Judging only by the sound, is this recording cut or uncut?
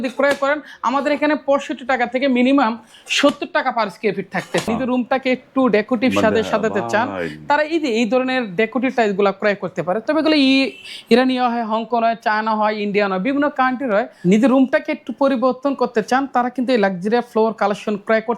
cut